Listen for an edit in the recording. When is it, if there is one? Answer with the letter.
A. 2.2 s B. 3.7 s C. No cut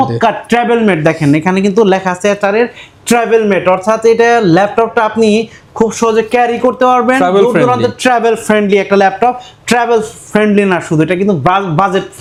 C